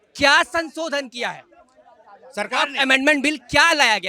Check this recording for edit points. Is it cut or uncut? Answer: uncut